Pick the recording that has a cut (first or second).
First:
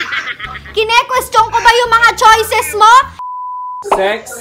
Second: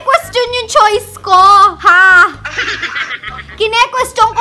first